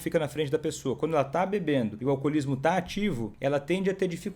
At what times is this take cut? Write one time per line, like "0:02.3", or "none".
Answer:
0:02.0
0:03.3